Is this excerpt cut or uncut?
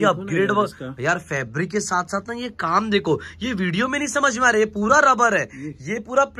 uncut